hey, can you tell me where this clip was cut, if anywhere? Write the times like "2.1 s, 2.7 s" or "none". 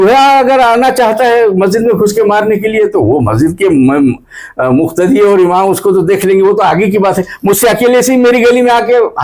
none